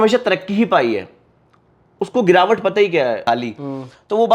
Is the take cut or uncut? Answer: cut